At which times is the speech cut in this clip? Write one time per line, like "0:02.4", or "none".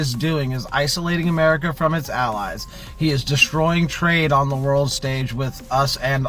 none